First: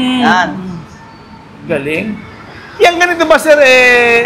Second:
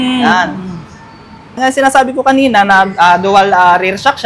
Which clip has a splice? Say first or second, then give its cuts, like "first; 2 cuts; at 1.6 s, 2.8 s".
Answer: second; 1 cut; at 1.6 s